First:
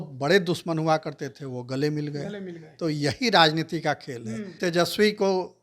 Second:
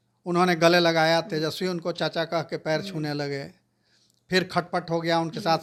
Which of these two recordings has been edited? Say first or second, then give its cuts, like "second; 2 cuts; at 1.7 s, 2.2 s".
first; 1 cut; at 4.6 s